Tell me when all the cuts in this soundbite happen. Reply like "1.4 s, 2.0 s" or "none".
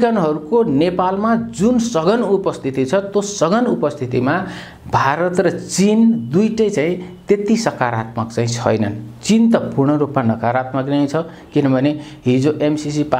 none